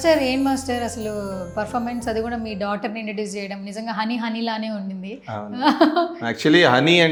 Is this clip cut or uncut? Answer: uncut